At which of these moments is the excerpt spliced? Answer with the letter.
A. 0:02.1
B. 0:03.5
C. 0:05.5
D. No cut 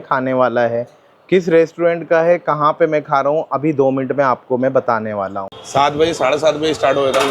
C